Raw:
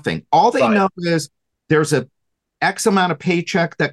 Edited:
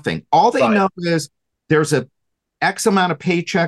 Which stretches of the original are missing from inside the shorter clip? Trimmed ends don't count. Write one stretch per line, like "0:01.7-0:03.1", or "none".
none